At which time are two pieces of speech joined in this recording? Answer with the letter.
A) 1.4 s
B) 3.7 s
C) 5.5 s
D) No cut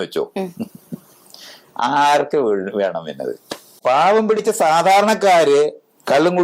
B